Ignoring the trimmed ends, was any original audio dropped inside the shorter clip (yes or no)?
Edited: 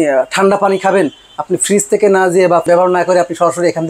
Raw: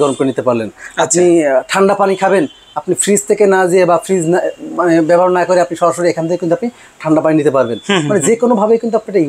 yes